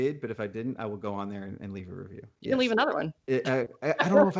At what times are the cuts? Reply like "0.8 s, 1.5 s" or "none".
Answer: none